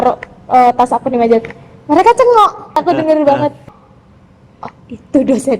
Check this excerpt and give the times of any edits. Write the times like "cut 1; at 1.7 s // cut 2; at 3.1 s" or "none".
cut 1; at 2.8 s // cut 2; at 3.6 s